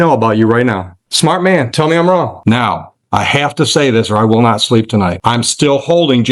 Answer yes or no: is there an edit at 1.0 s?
yes